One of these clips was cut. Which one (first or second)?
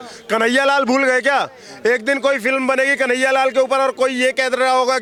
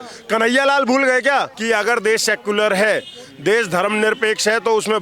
second